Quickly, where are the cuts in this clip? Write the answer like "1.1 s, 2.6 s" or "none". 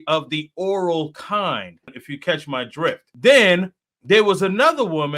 2.0 s, 3.1 s